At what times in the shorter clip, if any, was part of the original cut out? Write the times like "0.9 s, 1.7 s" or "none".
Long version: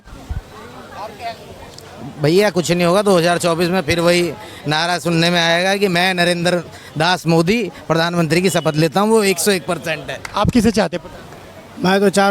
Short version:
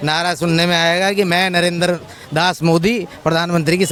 none